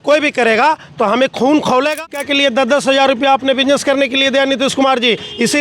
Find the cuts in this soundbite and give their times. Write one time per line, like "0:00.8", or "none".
0:02.0